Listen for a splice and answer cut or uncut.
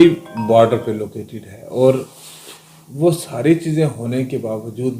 uncut